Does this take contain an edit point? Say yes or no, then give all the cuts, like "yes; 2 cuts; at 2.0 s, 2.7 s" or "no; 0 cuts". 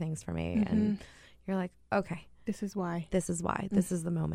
no; 0 cuts